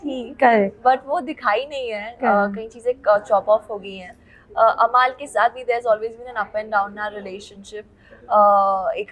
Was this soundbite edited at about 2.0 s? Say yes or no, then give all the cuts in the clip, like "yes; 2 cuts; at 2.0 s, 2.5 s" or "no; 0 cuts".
no; 0 cuts